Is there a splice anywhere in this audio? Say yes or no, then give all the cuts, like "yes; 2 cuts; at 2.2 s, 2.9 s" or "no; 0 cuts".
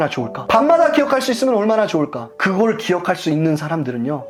no; 0 cuts